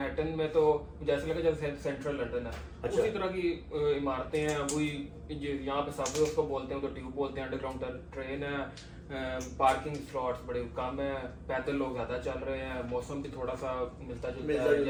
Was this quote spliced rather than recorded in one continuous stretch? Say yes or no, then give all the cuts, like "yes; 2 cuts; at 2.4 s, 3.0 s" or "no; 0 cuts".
no; 0 cuts